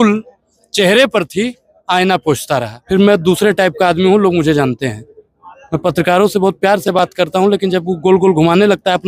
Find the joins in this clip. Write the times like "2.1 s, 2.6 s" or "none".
2.8 s